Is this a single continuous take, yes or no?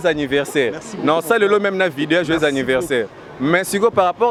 yes